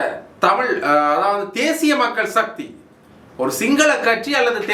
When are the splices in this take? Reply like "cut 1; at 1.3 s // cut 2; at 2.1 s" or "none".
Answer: none

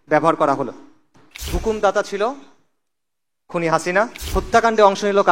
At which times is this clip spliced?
cut 1; at 1.5 s // cut 2; at 4.2 s

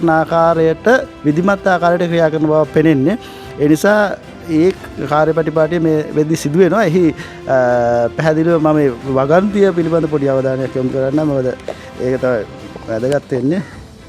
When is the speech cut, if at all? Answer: none

